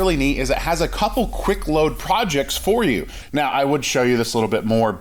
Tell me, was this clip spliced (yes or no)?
yes